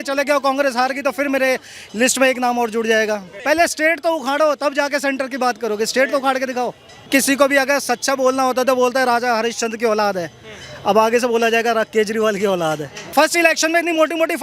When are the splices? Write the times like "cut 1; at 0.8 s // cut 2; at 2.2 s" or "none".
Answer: cut 1; at 3.3 s // cut 2; at 7.1 s // cut 3; at 13.1 s